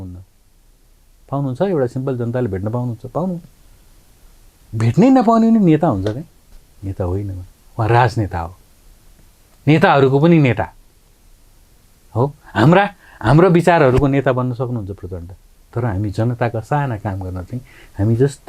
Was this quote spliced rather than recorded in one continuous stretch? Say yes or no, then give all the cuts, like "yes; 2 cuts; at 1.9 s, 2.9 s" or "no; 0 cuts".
no; 0 cuts